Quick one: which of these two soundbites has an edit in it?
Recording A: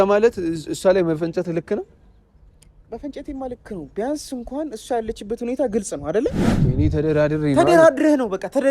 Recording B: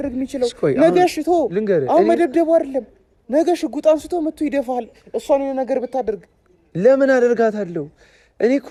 A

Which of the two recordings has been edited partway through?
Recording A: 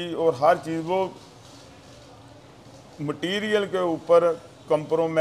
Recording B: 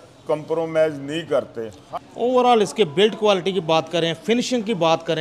B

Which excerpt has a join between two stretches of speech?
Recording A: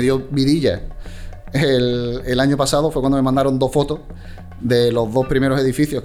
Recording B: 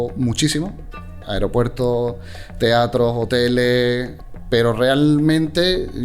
B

